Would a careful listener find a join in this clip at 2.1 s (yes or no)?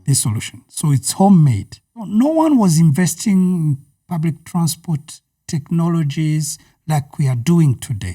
yes